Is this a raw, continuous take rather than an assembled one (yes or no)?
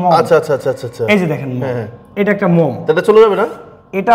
yes